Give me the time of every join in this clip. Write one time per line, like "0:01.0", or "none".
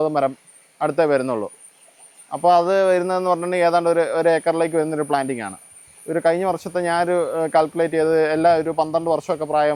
none